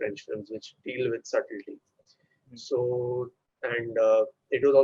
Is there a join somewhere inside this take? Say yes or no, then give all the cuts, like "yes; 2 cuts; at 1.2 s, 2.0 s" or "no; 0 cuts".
no; 0 cuts